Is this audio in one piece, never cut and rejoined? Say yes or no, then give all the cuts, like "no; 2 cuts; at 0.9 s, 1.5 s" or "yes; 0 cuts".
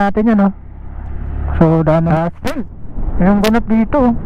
no; 1 cut; at 2.1 s